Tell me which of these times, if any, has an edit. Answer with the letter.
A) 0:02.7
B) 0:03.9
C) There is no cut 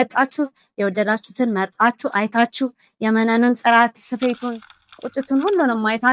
C